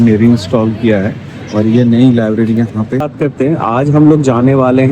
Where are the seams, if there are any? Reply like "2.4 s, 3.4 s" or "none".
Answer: 3.1 s